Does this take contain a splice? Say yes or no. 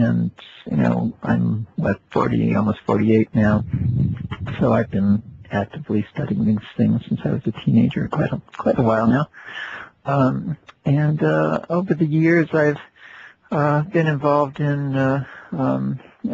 yes